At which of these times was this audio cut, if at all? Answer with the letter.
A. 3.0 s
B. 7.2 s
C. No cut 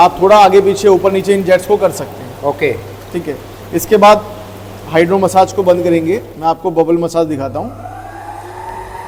C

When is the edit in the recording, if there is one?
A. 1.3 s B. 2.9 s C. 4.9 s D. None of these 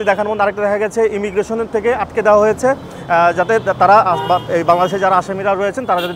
D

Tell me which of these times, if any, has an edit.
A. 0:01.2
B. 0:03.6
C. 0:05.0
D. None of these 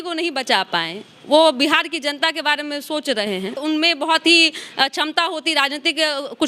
B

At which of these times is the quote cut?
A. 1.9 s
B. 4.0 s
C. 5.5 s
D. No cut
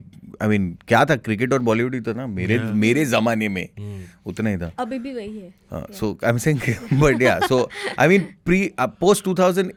D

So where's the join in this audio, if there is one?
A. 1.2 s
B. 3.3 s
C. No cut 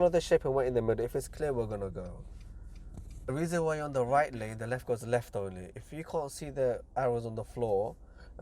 B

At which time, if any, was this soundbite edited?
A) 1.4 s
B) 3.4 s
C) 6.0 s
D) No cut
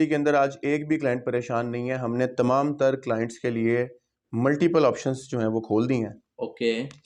D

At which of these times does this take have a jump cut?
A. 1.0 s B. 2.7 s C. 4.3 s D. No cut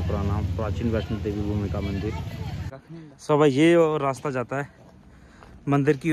B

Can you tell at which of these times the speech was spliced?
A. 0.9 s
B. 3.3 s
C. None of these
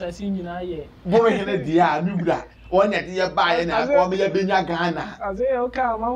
A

